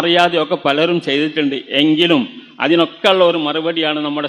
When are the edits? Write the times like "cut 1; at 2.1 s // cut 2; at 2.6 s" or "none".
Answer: none